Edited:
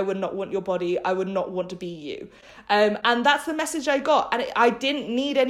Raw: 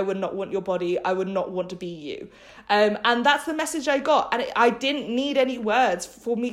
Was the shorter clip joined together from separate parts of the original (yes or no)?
no